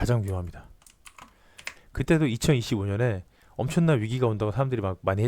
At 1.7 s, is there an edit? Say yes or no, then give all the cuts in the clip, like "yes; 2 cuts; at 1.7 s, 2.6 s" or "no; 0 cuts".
yes; 1 cut; at 1.7 s